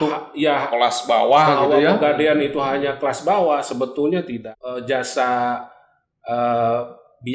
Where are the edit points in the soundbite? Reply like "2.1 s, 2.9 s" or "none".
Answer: 4.4 s